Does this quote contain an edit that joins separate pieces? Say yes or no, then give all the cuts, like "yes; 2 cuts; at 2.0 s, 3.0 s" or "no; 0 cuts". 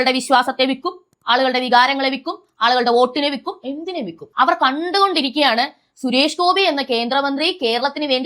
yes; 1 cut; at 4.2 s